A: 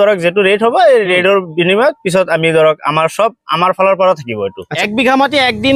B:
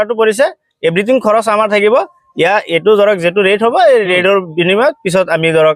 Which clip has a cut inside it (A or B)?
A